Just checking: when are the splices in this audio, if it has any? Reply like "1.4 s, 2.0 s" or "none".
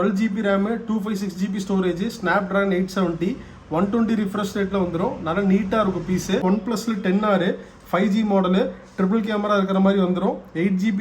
6.4 s